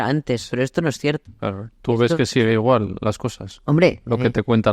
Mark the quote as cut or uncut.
uncut